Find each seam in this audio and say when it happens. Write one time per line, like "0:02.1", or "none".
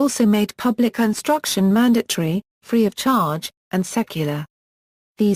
none